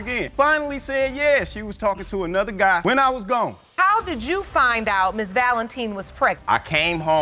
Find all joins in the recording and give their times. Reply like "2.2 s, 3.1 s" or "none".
3.7 s